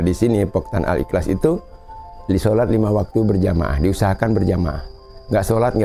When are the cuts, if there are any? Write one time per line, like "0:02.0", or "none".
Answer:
none